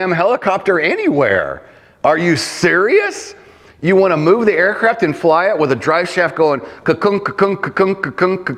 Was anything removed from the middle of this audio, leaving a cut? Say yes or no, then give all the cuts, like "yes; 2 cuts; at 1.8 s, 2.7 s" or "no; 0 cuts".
no; 0 cuts